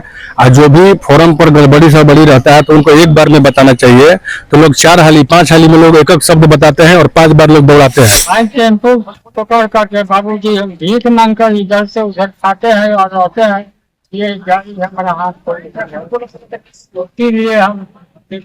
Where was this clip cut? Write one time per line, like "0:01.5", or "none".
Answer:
0:08.2